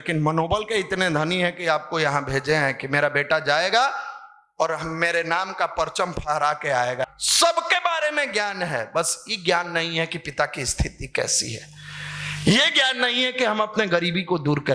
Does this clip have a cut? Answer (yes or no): yes